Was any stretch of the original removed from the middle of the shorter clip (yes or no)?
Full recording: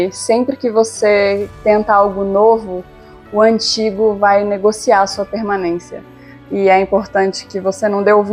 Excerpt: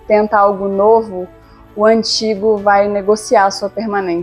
no